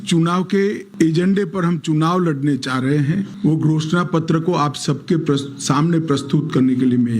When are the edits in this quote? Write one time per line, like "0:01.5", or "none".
0:00.8
0:03.3